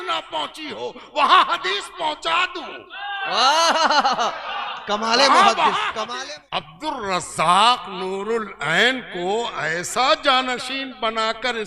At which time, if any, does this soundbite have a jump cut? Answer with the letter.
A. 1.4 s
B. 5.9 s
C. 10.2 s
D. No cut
B